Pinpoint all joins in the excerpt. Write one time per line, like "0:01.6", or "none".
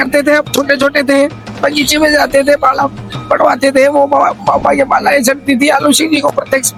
none